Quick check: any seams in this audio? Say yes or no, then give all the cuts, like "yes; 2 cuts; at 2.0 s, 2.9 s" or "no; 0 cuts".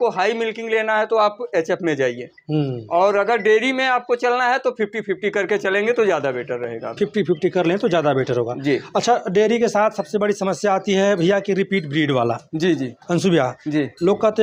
no; 0 cuts